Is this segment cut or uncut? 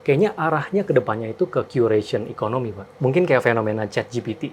cut